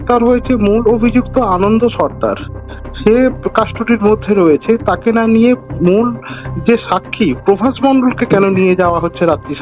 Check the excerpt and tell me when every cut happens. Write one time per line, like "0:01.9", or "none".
none

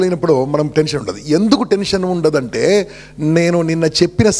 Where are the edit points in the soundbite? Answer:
none

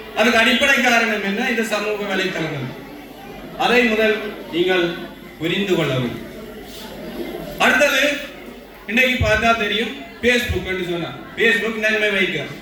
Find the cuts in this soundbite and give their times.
none

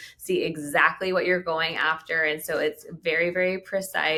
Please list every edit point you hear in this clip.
none

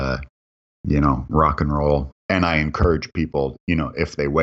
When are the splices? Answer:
0:02.1

